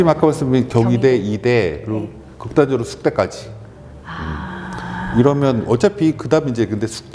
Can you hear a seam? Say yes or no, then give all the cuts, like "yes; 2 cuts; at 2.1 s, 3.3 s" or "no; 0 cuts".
no; 0 cuts